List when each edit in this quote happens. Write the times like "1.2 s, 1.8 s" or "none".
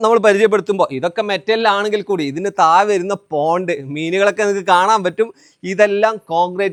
none